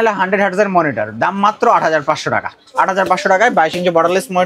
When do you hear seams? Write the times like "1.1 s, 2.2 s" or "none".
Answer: none